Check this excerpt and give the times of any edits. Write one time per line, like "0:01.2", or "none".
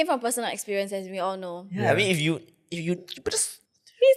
none

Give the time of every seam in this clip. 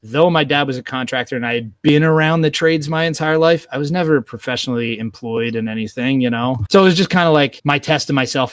0:07.6

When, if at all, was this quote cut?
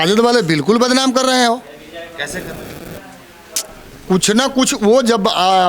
none

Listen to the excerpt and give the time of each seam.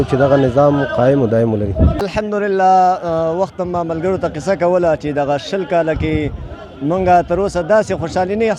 0:02.1

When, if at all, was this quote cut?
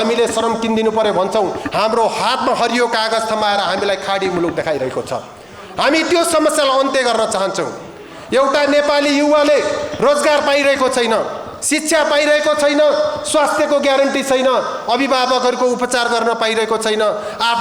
none

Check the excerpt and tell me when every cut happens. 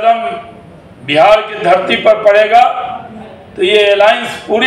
none

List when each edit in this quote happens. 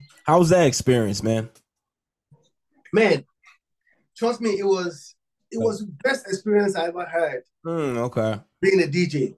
0:08.5

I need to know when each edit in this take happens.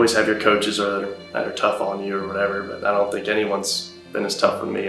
none

